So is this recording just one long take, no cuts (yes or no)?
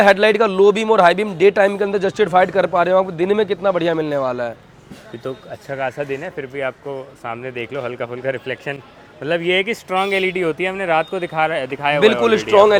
yes